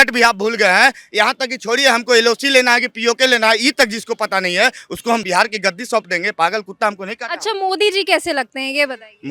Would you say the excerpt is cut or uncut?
uncut